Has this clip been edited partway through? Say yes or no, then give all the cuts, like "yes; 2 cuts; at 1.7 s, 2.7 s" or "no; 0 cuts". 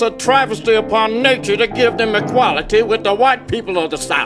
no; 0 cuts